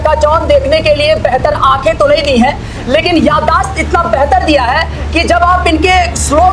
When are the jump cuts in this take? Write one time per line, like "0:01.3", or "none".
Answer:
none